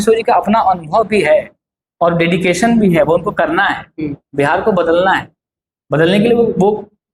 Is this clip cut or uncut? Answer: uncut